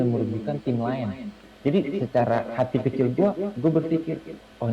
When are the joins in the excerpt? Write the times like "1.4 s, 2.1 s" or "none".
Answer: 1.5 s

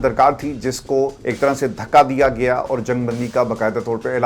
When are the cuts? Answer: 1.2 s

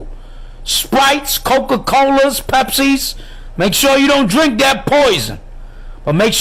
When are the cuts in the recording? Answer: none

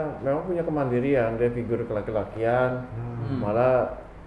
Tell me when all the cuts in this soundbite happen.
none

